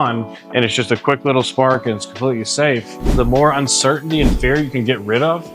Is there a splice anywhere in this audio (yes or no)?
yes